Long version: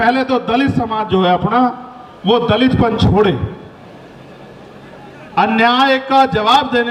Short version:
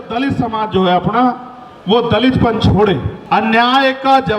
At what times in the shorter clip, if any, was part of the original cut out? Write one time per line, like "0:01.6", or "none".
0:03.1

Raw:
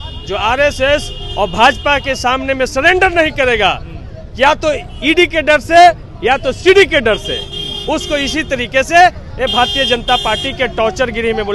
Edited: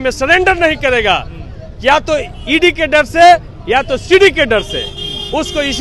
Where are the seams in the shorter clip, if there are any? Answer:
none

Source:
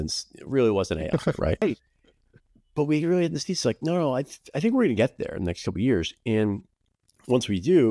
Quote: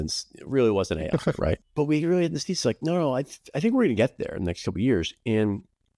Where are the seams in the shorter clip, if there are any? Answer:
0:01.6

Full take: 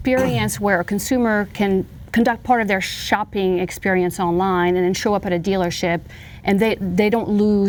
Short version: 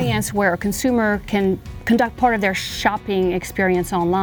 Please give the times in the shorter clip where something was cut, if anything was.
none

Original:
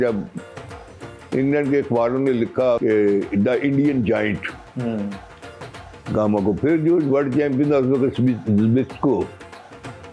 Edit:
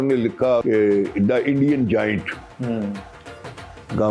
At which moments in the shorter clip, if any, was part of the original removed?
none

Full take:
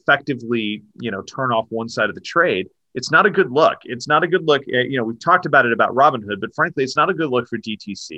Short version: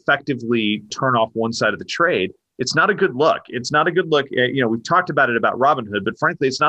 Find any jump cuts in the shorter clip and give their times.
0:00.9

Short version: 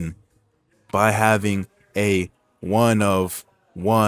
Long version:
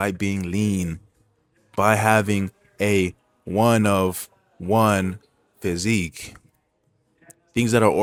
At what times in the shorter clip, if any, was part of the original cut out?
none

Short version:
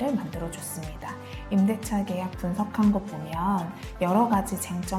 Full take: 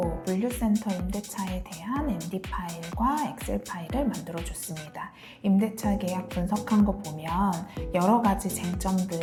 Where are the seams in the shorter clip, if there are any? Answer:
none

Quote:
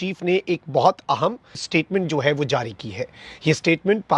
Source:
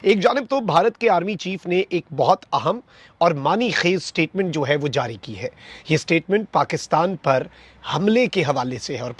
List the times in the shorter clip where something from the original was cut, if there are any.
0:01.6

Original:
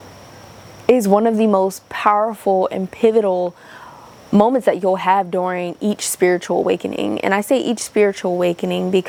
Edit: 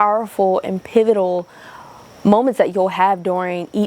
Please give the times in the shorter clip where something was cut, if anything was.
none

